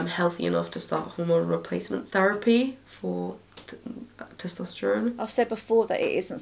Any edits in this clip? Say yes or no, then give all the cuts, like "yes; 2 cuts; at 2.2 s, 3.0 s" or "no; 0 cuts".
yes; 1 cut; at 5.2 s